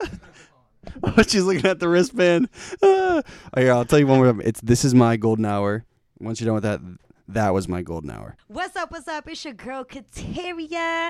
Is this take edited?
yes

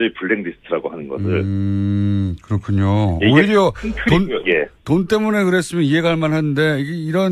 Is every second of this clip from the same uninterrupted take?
yes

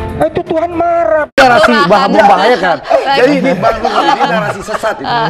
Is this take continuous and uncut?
no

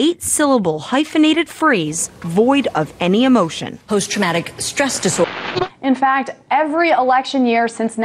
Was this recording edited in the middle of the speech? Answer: yes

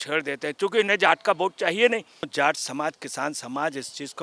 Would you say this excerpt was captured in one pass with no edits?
no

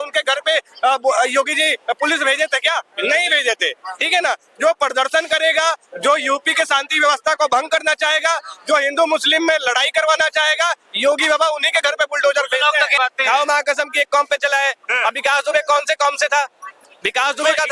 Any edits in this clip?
yes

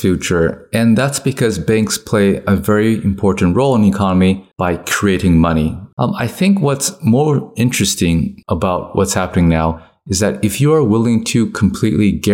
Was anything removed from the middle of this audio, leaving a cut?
yes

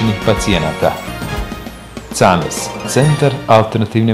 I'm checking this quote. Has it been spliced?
no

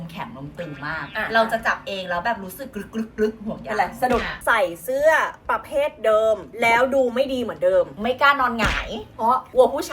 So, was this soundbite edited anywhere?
yes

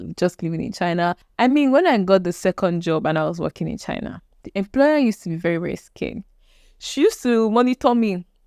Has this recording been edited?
yes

